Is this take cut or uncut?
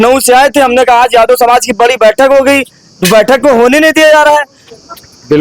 uncut